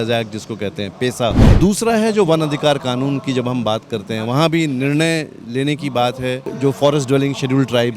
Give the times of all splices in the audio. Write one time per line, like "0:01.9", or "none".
0:01.5
0:06.5